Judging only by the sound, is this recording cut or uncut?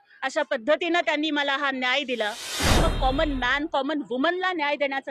cut